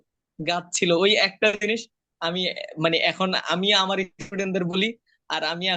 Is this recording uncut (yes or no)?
yes